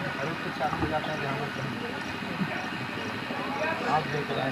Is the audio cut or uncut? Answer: uncut